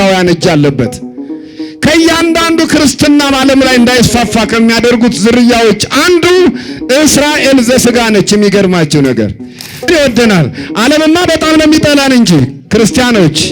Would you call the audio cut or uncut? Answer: cut